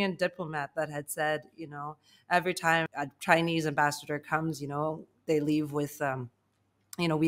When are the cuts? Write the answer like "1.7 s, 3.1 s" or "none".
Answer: 2.9 s